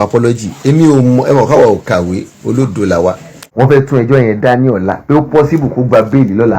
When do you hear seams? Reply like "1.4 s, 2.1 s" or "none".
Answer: 2.9 s